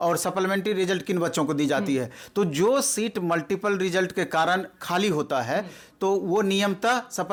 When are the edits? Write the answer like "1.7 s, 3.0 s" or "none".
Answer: none